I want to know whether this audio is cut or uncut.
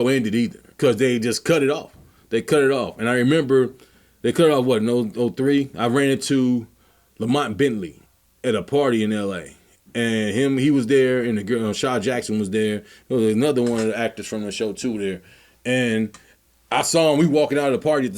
uncut